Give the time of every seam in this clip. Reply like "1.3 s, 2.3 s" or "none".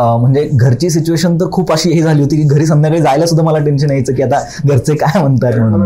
none